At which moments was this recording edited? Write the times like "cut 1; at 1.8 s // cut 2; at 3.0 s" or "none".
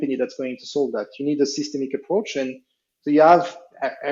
none